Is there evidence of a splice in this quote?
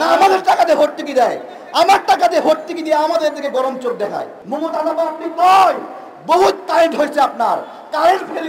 yes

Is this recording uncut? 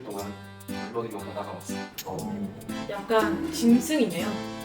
no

